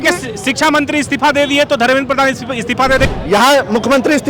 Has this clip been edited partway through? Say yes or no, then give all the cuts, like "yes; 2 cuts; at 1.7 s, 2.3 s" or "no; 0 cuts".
yes; 1 cut; at 3.1 s